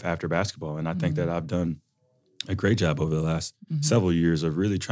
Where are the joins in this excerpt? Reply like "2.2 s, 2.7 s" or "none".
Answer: none